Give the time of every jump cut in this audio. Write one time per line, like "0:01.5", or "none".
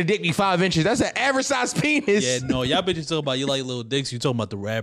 none